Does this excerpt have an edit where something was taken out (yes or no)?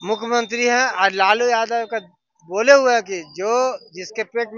no